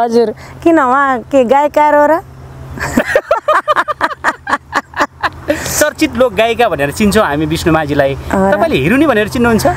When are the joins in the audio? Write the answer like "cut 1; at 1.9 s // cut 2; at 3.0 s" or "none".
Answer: none